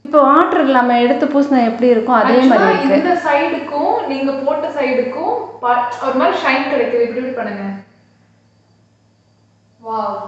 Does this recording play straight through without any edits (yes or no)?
yes